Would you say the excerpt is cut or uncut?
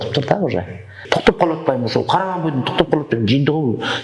cut